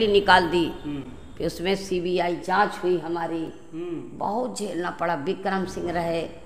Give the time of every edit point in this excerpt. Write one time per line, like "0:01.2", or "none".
none